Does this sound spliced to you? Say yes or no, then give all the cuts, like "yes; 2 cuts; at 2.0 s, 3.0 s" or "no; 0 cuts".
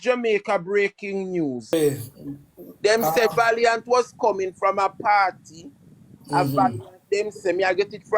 yes; 1 cut; at 1.7 s